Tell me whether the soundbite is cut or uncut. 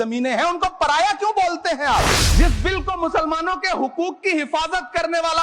cut